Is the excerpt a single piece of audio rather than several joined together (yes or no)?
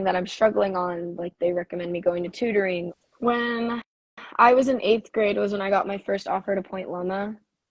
no